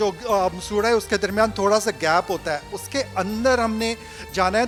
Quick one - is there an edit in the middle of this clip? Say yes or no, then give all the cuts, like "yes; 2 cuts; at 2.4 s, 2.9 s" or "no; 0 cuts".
no; 0 cuts